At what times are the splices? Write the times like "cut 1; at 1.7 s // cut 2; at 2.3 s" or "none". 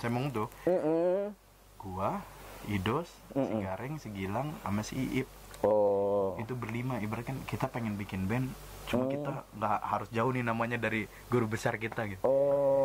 none